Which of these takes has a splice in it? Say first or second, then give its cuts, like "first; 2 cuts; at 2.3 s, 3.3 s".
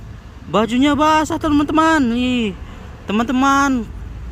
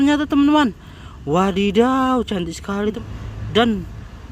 second; 1 cut; at 3.0 s